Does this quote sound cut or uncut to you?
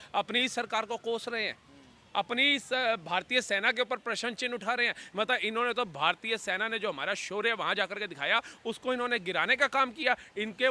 uncut